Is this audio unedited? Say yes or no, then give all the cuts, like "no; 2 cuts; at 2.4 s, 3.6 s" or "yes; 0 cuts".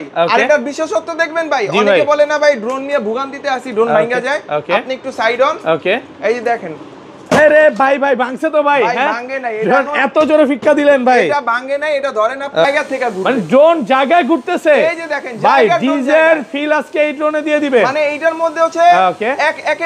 no; 1 cut; at 12.6 s